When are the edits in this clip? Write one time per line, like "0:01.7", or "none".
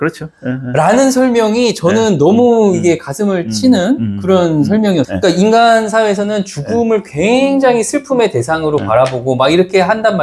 0:05.1